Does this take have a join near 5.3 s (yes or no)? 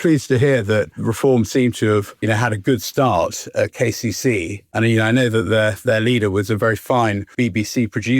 no